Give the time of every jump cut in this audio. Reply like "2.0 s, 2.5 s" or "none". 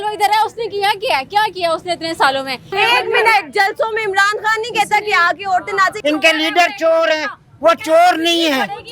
2.7 s, 6.0 s